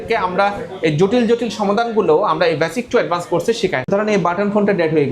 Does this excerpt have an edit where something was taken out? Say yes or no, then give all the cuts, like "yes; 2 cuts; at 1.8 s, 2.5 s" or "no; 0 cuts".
yes; 1 cut; at 3.9 s